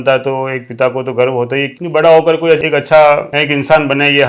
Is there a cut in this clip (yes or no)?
yes